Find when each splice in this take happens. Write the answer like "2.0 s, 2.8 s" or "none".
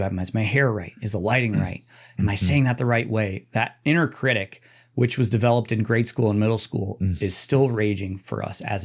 none